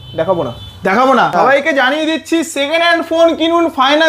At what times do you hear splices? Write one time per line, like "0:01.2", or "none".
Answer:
0:01.3